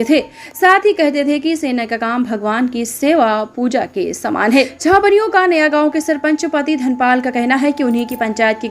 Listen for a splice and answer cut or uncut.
cut